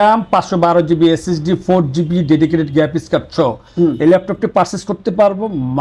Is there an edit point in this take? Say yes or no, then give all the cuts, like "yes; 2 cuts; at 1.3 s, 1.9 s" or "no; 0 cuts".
no; 0 cuts